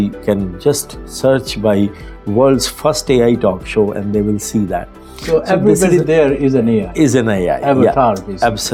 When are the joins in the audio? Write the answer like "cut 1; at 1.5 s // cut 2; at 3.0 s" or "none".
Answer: none